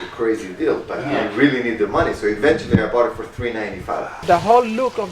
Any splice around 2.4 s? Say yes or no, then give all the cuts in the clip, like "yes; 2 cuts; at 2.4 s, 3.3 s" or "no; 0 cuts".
no; 1 cut; at 4.1 s